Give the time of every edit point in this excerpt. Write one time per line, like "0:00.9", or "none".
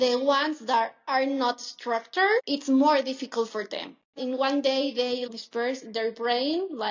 0:02.5
0:04.1
0:05.3